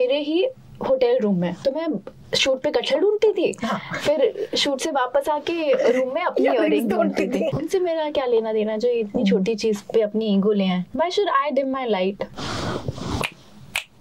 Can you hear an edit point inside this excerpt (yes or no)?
yes